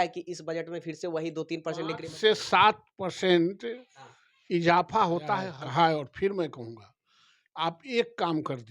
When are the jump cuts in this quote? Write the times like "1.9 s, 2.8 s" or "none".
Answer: 5.5 s